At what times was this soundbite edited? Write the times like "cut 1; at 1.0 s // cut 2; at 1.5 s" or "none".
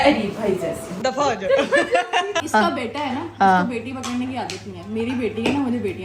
cut 1; at 0.9 s // cut 2; at 2.4 s